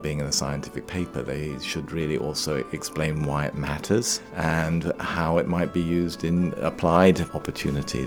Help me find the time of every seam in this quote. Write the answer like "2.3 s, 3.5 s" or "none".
4.2 s, 6.6 s, 7.3 s